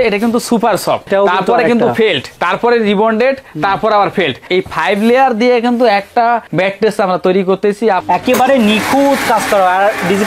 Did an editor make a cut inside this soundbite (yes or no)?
yes